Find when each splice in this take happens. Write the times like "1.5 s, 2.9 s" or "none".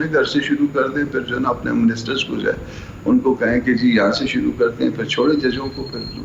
none